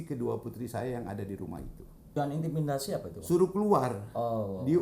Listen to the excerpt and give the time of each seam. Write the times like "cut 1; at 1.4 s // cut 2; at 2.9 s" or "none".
cut 1; at 2.1 s

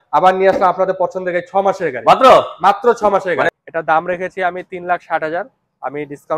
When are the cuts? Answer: cut 1; at 3.6 s

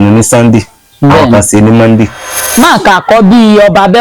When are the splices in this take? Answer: cut 1; at 2.3 s

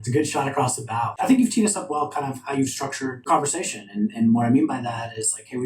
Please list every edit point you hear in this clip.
cut 1; at 1.1 s // cut 2; at 3.3 s

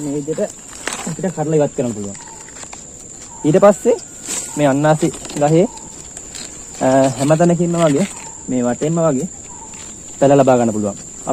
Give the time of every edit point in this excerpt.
none

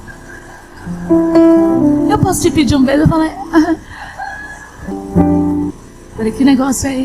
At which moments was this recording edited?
cut 1; at 4.9 s // cut 2; at 5.8 s

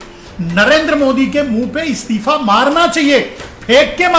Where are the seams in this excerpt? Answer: none

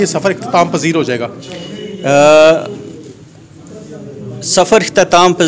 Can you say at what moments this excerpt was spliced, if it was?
none

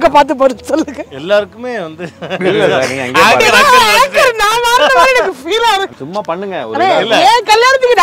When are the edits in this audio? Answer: cut 1; at 6.0 s

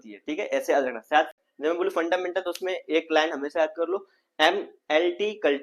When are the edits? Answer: cut 1; at 1.3 s

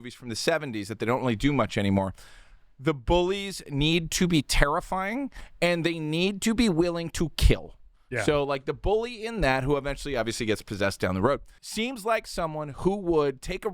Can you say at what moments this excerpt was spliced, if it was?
cut 1; at 11.8 s

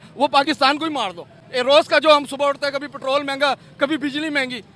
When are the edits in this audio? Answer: none

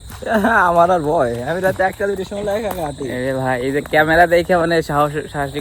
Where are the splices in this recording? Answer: none

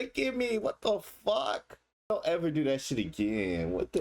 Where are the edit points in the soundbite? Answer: cut 1; at 2.1 s

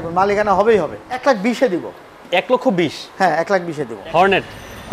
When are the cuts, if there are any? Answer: cut 1; at 1.2 s // cut 2; at 3.9 s

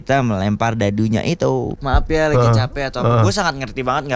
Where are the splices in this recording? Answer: cut 1; at 1.7 s

